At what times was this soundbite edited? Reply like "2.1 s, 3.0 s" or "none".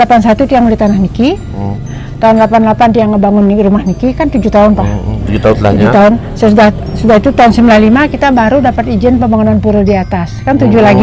none